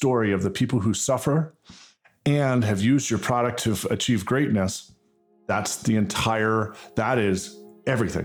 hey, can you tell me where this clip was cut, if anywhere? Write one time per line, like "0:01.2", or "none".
0:03.6

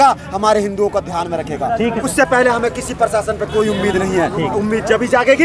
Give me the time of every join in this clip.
0:02.1

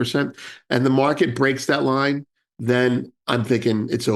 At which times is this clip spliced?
0:03.1

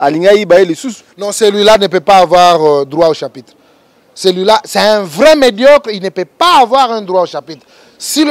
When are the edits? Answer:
none

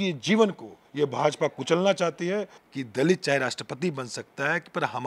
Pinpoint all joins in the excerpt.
0:02.6

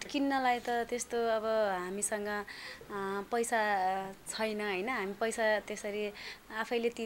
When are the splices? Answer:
none

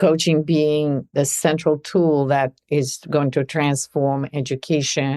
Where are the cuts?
0:01.1

